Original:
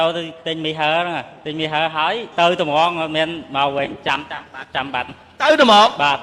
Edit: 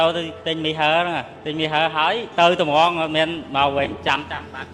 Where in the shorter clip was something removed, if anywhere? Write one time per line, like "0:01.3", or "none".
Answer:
none